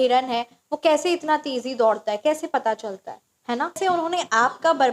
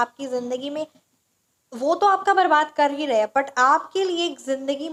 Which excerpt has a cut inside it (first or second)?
first